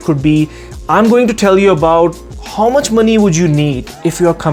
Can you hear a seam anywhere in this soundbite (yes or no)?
no